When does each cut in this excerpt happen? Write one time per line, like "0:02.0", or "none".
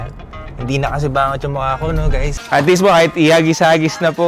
0:02.3